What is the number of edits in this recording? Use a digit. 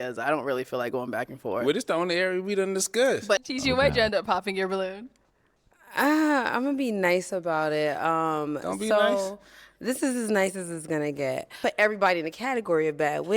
2